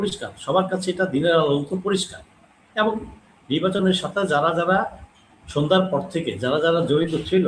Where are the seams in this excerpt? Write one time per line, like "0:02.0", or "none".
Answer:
none

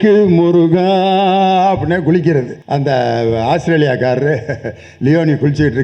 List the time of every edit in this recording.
0:02.6

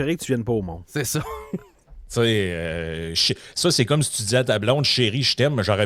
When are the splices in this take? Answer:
none

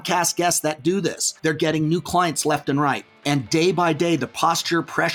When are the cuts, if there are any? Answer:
0:01.3
0:03.1

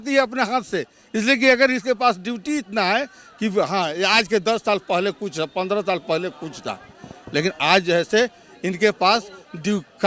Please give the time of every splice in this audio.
none

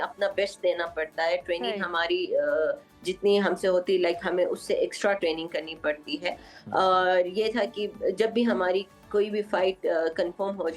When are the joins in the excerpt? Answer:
none

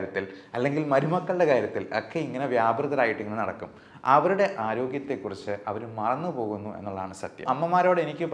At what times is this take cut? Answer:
0:07.4

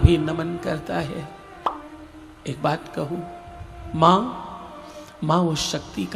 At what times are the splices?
none

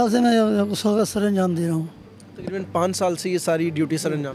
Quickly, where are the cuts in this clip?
none

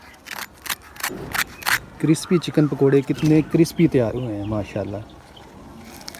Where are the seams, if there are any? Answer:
none

